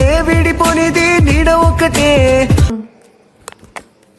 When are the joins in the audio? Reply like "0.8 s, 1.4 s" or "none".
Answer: 2.7 s